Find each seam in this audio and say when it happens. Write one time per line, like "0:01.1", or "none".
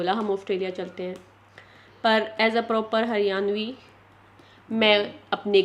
none